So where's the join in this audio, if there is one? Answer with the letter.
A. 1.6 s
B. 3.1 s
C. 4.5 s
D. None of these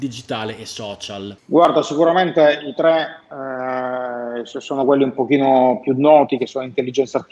A